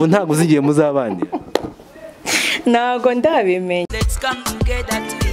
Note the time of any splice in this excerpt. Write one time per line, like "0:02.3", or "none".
0:03.9